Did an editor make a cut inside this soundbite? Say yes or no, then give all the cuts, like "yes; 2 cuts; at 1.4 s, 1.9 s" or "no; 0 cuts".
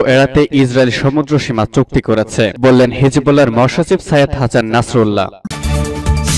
yes; 1 cut; at 5.4 s